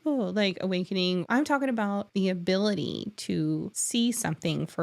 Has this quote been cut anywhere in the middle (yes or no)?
yes